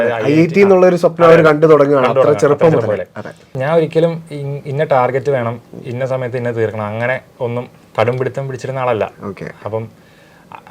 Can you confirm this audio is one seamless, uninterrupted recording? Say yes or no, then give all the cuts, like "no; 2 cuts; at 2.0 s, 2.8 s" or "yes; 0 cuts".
no; 1 cut; at 3.6 s